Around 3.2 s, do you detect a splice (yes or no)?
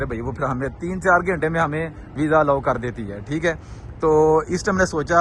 no